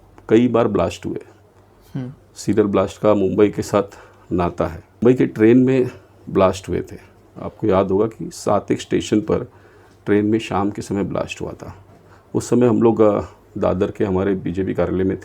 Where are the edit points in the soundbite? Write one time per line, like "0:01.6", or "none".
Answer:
0:05.0